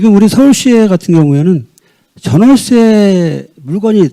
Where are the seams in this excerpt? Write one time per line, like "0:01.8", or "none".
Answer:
none

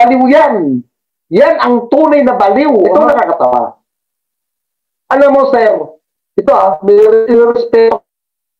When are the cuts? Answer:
0:02.8

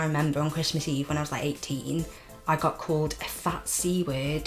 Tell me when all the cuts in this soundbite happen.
none

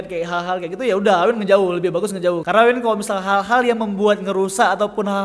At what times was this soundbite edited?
0:02.4

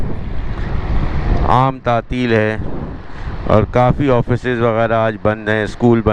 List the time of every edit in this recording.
none

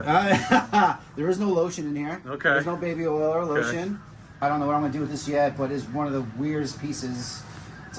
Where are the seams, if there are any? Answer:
0:04.4

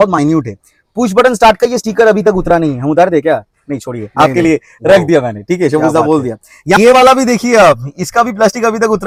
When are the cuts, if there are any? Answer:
none

